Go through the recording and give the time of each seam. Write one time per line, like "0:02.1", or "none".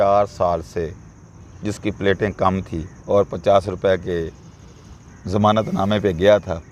none